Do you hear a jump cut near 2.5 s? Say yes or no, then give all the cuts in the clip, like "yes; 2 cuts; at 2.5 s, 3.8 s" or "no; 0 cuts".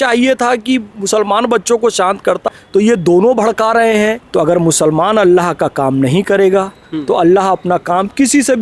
yes; 2 cuts; at 2.5 s, 4.2 s